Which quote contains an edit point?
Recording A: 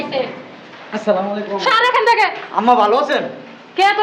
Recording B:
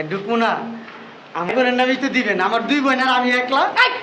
B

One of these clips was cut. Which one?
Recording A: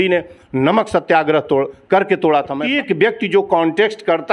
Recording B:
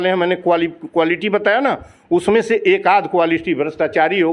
A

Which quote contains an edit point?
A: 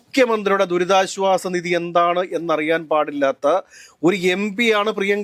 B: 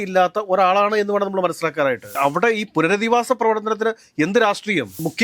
B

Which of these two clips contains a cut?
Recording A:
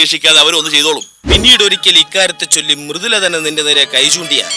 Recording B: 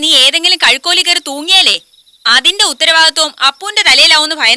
A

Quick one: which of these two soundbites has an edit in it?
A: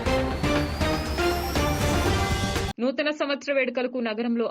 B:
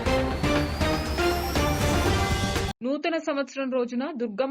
A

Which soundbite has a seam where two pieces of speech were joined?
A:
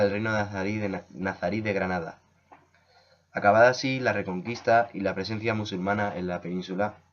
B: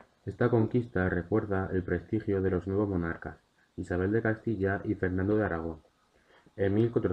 A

